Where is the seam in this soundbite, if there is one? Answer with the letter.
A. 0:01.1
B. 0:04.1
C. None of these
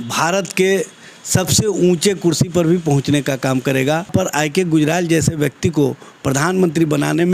B